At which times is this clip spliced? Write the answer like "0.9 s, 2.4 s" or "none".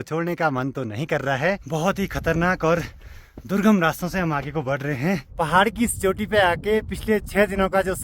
1.6 s, 5.3 s